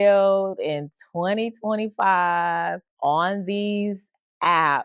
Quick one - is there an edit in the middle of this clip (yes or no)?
yes